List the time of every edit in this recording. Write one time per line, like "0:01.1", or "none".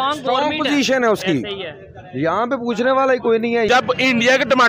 0:03.7

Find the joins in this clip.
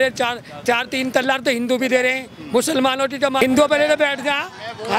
0:03.5

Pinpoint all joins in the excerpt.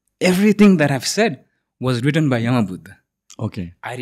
none

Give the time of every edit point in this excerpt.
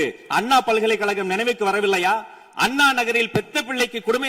none

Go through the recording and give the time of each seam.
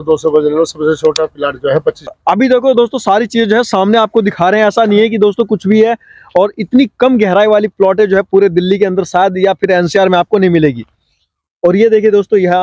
0:02.2

